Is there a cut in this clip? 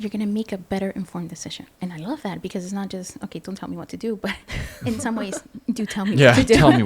yes; 1 cut; at 1.8 s

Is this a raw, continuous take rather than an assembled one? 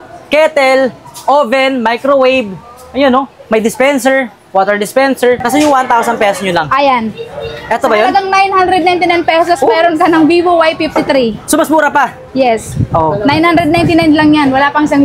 no; 1 cut; at 5.4 s

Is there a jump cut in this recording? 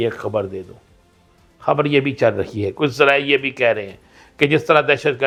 no; 0 cuts

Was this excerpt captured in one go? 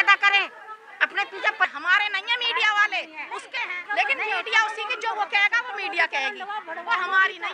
no; 2 cuts; at 1.7 s, 3.8 s

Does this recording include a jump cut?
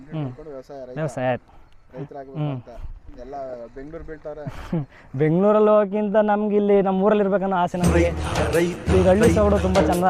no; 0 cuts

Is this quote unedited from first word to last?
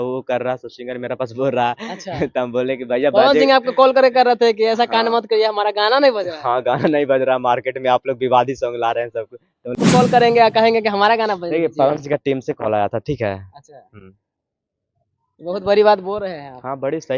no; 1 cut; at 9.8 s

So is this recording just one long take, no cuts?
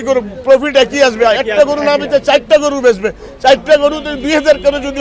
yes; 0 cuts

